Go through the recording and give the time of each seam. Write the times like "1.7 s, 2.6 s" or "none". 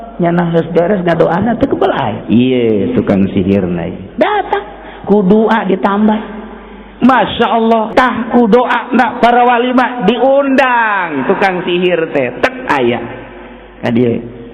7.9 s